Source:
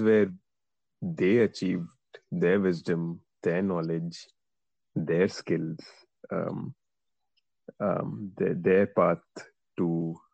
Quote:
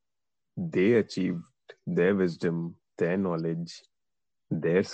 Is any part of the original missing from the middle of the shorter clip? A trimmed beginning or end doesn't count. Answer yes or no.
no